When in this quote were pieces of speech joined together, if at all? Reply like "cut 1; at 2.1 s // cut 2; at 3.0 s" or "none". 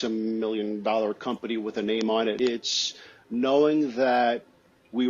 cut 1; at 2.4 s